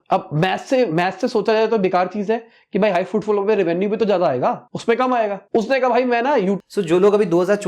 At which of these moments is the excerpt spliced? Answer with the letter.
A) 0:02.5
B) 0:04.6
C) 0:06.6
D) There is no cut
C